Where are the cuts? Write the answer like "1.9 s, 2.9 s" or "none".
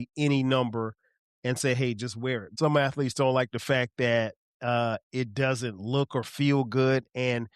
2.5 s